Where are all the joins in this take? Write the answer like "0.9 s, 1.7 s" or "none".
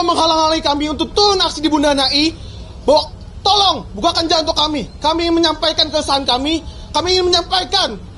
none